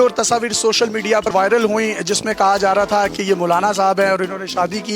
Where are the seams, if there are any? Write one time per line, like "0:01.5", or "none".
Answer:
0:01.3